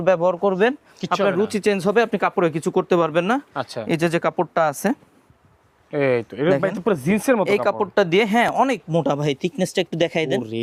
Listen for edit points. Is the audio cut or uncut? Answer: uncut